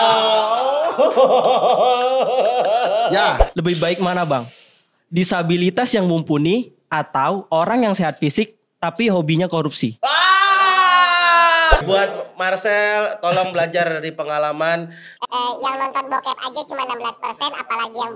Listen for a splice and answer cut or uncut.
cut